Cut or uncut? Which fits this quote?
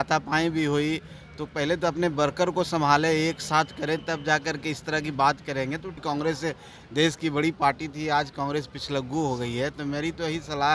cut